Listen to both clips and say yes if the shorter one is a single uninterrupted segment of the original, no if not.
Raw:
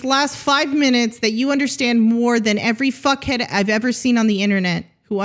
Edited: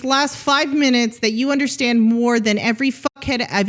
yes